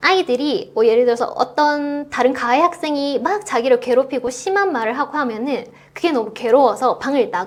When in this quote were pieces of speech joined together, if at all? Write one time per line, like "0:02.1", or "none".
none